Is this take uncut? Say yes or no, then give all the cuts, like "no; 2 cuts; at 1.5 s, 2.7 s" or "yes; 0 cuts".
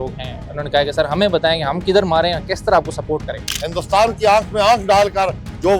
no; 1 cut; at 3.5 s